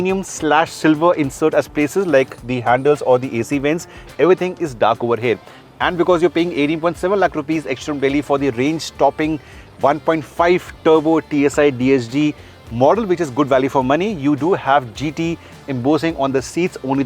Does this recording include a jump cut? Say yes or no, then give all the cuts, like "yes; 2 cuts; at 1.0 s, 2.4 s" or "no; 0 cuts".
no; 0 cuts